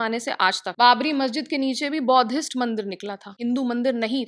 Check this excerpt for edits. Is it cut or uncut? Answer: cut